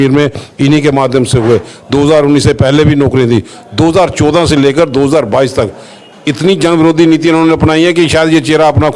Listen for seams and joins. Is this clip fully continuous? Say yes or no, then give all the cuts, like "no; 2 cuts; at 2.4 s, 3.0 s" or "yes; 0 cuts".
yes; 0 cuts